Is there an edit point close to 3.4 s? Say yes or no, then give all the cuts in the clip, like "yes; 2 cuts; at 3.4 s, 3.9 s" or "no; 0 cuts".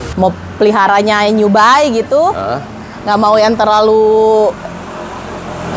no; 0 cuts